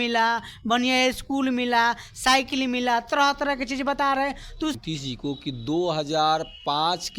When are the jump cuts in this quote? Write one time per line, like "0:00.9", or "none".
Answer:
0:04.8